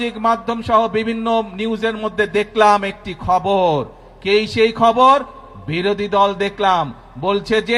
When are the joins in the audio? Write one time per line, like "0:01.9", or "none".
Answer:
none

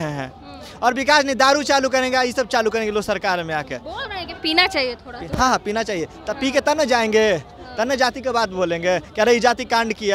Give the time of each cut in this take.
none

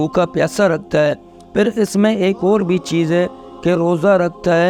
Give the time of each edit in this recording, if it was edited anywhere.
none

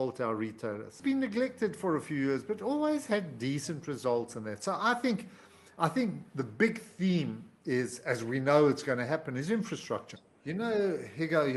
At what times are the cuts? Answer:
0:00.9
0:10.2

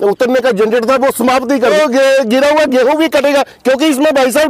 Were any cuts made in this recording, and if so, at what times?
0:01.7

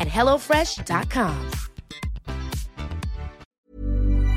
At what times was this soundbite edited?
0:03.4

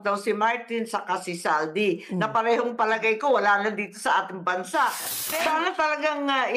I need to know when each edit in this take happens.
0:05.1

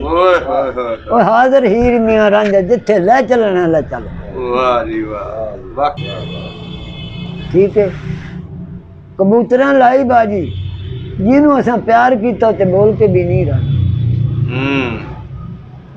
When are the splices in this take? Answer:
0:06.0

